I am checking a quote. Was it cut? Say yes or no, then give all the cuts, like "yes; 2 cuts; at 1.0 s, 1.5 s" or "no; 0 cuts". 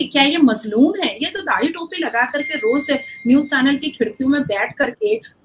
no; 0 cuts